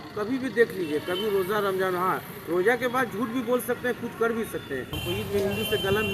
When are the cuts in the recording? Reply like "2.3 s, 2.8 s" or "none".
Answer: 4.9 s